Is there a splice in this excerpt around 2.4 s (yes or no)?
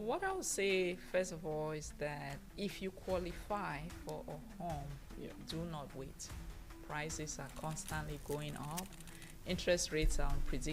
yes